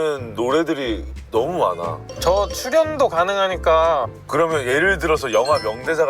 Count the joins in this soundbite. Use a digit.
2